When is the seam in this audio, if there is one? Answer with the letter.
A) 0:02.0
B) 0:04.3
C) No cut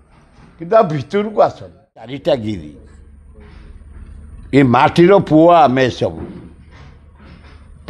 A